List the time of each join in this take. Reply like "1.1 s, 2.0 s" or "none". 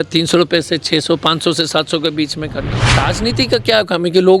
2.9 s